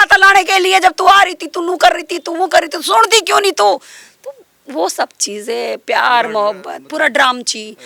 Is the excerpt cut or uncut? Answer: uncut